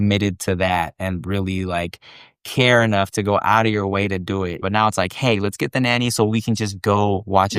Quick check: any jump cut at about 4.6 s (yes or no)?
yes